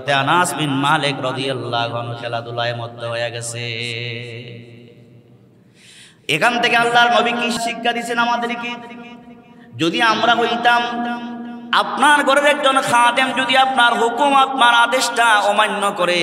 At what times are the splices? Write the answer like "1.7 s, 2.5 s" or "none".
7.6 s